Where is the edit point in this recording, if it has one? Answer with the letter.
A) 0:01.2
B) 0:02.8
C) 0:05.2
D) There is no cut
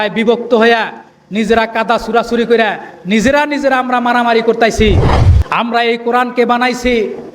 C